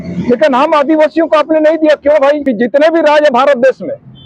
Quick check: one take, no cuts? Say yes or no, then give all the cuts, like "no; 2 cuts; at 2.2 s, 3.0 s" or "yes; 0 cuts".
no; 1 cut; at 2.4 s